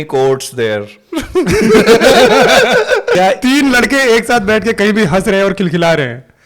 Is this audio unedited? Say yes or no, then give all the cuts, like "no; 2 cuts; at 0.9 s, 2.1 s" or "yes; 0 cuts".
no; 1 cut; at 3.2 s